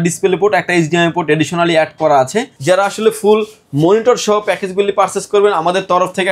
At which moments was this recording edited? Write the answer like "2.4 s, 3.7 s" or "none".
2.5 s